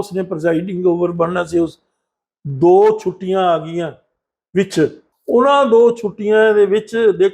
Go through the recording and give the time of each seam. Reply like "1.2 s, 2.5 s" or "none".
5.1 s